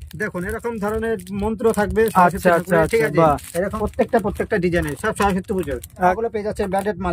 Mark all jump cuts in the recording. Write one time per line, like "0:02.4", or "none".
0:03.7
0:06.1